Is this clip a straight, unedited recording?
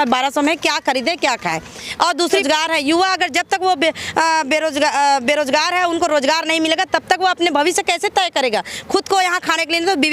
no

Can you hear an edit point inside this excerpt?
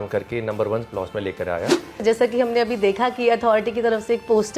yes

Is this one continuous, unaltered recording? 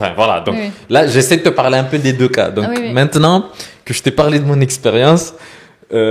yes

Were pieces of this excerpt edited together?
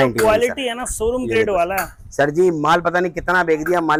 no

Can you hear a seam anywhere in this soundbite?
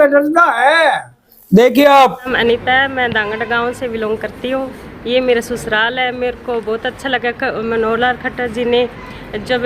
yes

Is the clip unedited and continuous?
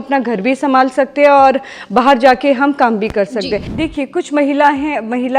no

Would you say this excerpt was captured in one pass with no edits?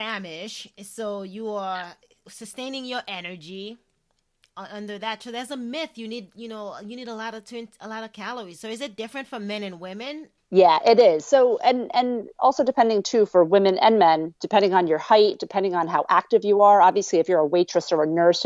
no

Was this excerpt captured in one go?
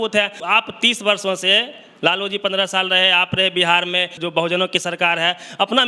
no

